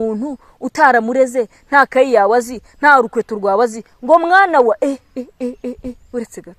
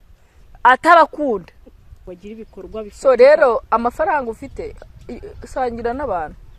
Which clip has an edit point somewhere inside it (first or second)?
second